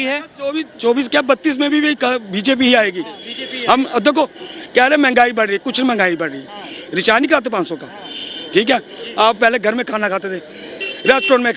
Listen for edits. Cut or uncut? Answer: uncut